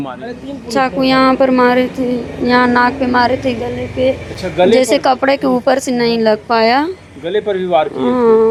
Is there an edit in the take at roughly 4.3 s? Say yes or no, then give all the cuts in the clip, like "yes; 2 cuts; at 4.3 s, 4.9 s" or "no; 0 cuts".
no; 0 cuts